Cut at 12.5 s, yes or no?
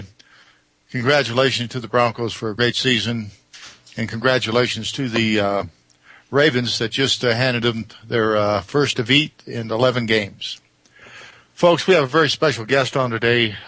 yes